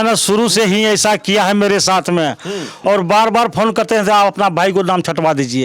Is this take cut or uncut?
cut